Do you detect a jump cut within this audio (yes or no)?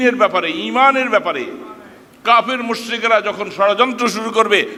no